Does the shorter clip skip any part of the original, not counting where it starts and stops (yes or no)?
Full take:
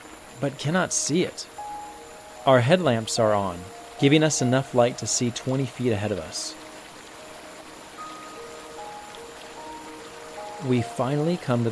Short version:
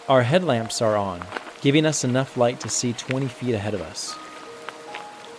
yes